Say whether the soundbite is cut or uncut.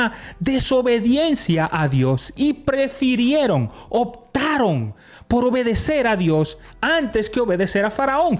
uncut